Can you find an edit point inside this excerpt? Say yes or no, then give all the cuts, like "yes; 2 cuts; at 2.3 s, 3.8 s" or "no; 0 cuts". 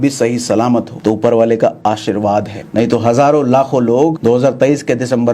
yes; 3 cuts; at 0.9 s, 2.6 s, 4.2 s